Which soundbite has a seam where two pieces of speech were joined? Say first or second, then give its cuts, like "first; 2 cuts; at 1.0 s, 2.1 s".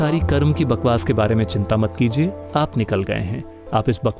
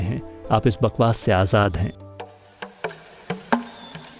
second; 1 cut; at 2.0 s